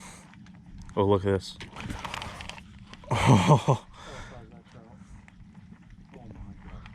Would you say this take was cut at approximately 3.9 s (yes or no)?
yes